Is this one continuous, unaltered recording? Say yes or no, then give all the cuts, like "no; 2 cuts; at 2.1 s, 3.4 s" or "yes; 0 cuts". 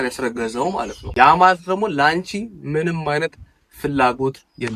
no; 1 cut; at 1.0 s